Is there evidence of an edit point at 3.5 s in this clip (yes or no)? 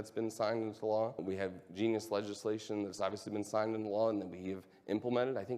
no